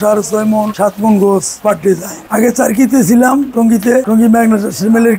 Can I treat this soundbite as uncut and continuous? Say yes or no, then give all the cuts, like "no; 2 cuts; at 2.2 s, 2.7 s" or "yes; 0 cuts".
yes; 0 cuts